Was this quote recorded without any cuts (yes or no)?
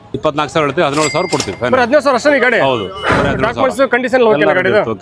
yes